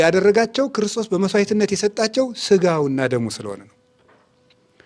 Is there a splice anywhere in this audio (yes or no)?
no